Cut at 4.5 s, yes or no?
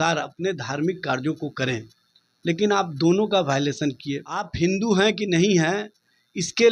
yes